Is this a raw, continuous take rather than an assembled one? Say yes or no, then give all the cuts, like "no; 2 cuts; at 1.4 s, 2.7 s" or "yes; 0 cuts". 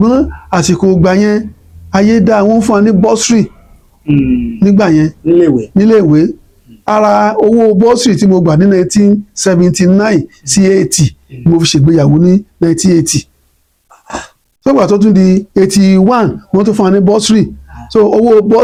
yes; 0 cuts